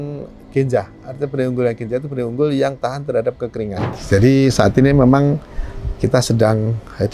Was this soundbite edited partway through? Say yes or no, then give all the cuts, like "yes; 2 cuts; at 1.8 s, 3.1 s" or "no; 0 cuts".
yes; 1 cut; at 3.9 s